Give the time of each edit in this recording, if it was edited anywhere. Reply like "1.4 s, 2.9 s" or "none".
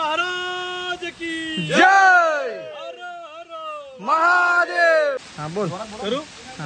5.2 s

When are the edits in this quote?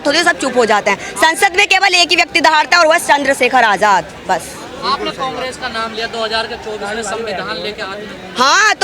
none

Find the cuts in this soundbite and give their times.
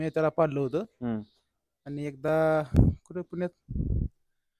none

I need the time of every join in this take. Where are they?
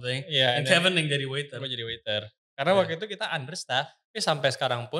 4.0 s

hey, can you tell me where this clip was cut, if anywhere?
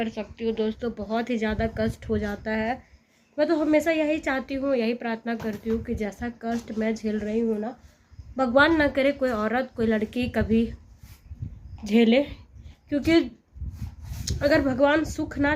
none

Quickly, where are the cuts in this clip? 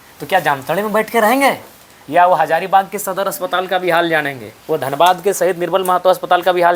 none

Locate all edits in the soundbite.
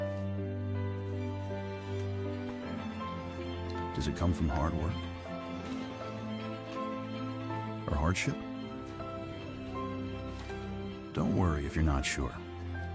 3.6 s

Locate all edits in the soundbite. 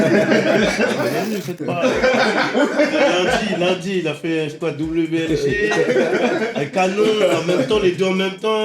1.1 s

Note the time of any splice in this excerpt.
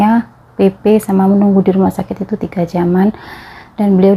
none

